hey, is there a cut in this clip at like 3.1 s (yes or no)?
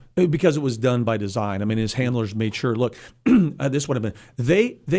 no